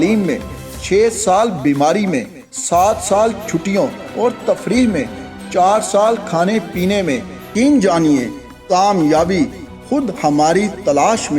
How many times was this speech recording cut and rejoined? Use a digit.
1